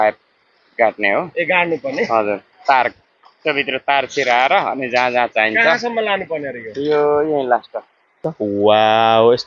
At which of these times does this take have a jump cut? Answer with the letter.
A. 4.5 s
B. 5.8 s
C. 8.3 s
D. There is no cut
C